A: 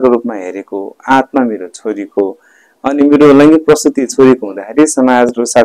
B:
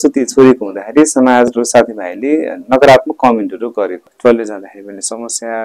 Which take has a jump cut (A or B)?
B